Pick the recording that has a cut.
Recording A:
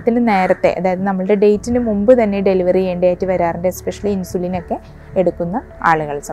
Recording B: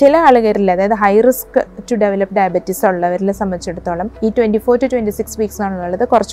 B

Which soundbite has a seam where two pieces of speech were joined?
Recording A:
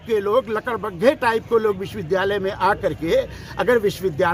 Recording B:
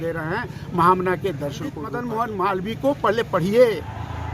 B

